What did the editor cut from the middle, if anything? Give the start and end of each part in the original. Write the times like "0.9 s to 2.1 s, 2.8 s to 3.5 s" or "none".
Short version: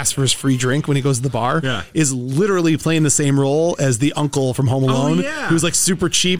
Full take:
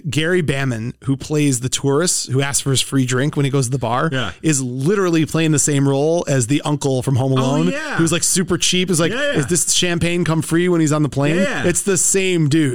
none